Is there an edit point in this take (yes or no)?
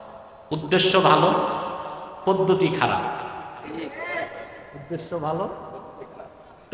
no